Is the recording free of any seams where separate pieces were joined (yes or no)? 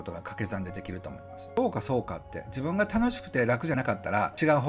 no